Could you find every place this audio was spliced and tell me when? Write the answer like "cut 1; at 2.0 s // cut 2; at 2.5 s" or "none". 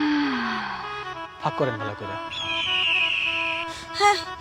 cut 1; at 0.9 s